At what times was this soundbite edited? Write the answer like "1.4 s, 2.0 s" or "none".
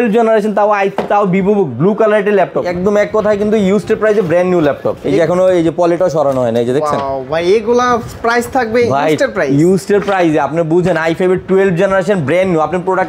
2.7 s, 4.9 s